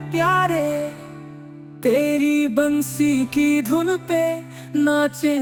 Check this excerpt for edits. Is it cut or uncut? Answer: uncut